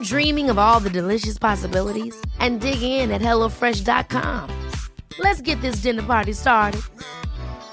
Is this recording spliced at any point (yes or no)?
no